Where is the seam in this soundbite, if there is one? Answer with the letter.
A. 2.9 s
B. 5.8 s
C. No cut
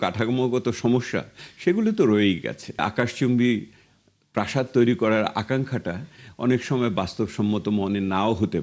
A